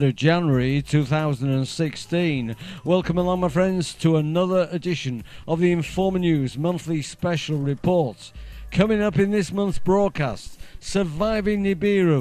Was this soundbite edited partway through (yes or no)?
yes